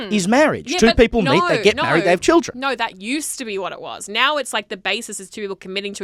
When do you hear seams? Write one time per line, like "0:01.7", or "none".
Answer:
none